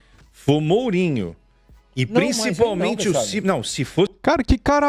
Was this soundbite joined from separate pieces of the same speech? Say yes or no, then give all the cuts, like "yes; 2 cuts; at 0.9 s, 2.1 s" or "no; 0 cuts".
no; 0 cuts